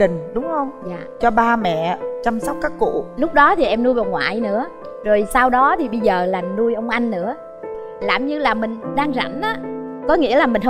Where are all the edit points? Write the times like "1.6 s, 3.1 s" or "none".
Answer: none